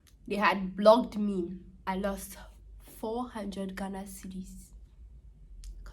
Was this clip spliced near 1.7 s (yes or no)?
yes